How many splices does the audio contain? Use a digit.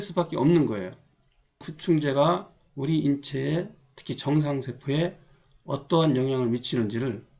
1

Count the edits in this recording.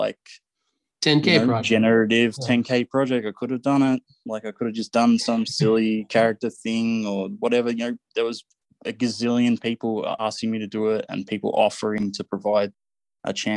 2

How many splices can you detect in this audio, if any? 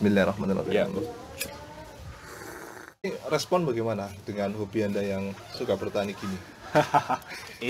1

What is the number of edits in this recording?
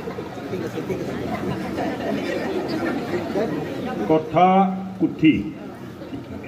0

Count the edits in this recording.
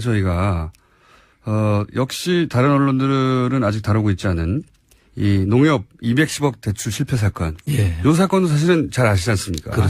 1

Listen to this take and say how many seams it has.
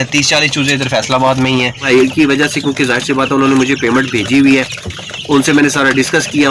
1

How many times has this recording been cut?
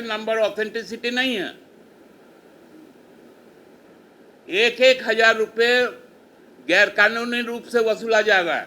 0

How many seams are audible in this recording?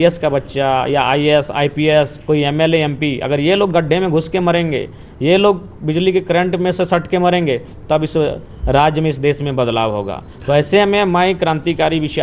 0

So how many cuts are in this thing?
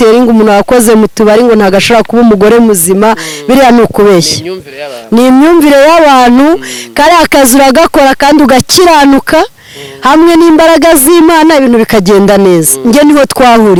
0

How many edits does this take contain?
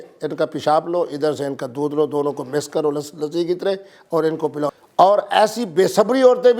1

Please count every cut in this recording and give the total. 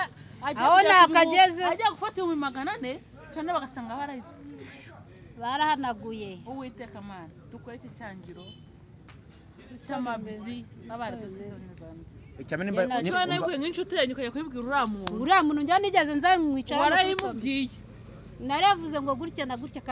1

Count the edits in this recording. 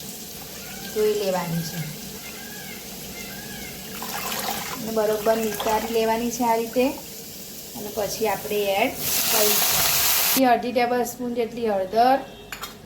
1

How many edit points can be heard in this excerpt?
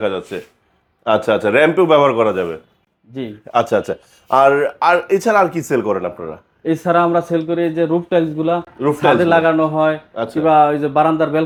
0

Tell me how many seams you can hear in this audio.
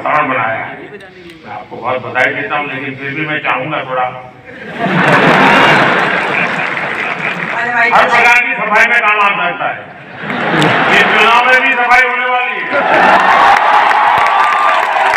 1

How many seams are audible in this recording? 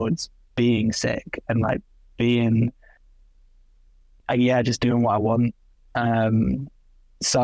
0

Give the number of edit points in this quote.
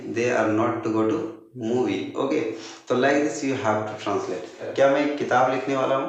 1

